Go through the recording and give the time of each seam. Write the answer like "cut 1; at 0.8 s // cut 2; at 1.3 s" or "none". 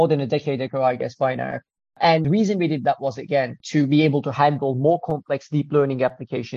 cut 1; at 2.2 s // cut 2; at 3.6 s